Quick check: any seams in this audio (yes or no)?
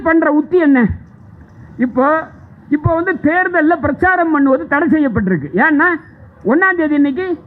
no